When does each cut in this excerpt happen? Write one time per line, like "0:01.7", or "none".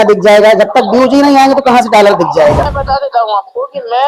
0:02.7